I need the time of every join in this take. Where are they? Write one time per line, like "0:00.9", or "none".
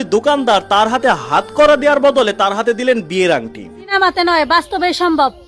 0:03.9